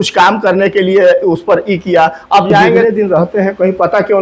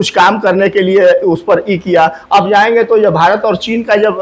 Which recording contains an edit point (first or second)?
first